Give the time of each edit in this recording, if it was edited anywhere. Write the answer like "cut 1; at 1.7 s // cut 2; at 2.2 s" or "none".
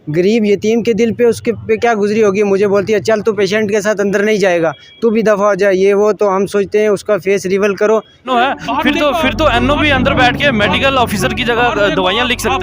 cut 1; at 8.3 s